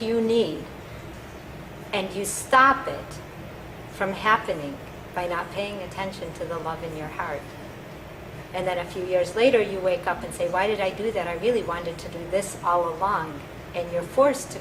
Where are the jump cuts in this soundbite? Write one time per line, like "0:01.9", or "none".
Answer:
0:02.4